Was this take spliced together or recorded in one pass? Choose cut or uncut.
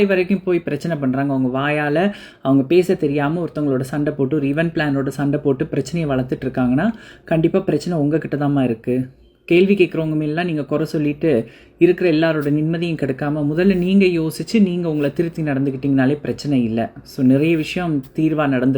uncut